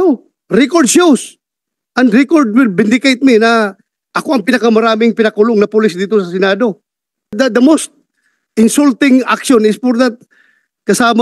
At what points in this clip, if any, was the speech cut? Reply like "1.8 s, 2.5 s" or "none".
7.3 s